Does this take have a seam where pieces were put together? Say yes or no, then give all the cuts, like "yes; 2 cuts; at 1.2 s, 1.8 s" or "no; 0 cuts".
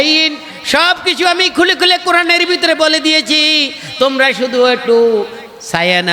no; 0 cuts